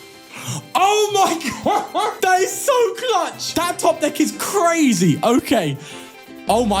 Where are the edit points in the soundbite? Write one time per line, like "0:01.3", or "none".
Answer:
0:02.2
0:03.4

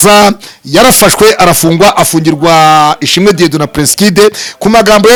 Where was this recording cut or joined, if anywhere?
none

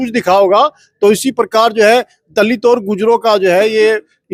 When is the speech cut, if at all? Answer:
none

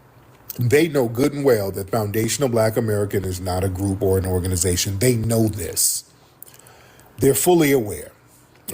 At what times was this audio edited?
0:05.2

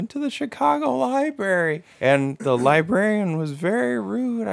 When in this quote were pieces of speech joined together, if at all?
0:02.2

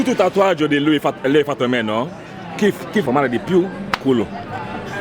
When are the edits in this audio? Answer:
0:03.0

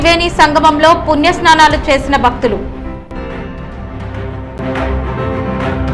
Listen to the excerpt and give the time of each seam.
0:04.5

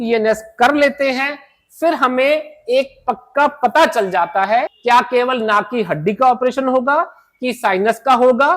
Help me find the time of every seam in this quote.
0:04.7

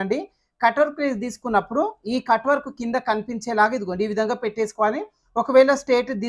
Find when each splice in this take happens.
none

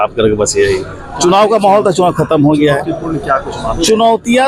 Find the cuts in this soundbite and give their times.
none

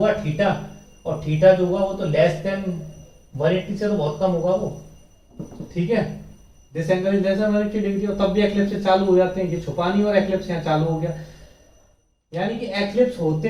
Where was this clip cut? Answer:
none

